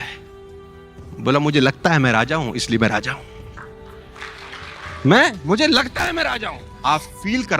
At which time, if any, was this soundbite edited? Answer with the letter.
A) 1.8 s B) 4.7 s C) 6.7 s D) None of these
C